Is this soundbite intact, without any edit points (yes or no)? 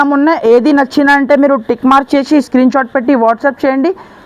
yes